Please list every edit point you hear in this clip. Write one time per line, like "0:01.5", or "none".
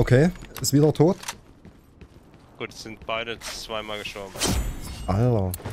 none